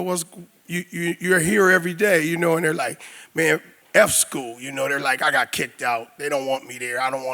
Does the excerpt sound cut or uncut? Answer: cut